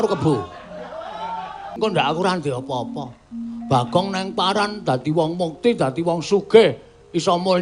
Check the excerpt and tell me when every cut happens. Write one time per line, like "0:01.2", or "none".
0:01.7